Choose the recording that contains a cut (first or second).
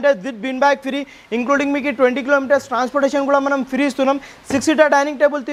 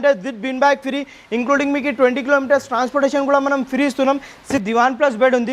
second